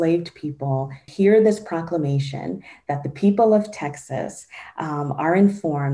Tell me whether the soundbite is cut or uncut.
cut